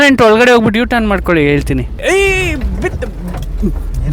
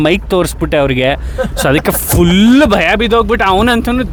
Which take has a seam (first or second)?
first